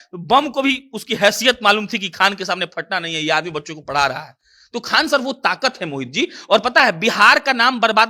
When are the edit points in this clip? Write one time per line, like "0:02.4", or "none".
none

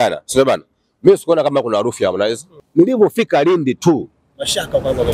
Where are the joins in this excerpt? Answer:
0:02.6

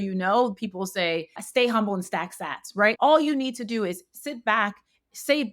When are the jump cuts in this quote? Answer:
0:01.4
0:03.0

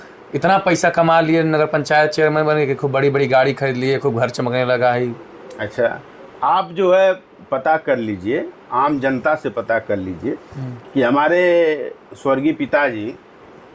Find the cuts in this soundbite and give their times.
none

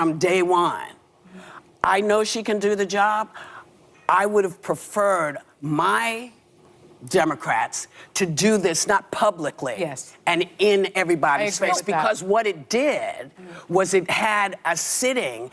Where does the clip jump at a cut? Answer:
none

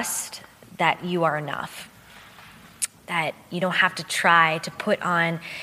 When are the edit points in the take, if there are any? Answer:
none

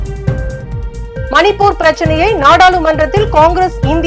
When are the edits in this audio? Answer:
0:01.3

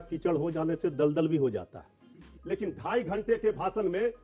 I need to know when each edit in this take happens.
0:02.3

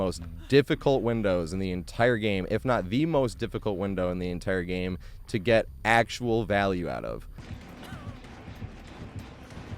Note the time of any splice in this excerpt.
0:07.3

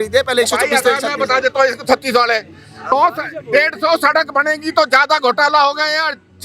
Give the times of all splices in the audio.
0:02.9

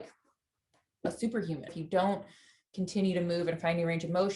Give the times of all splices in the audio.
0:01.8

